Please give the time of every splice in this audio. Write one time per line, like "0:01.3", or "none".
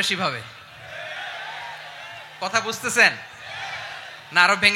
none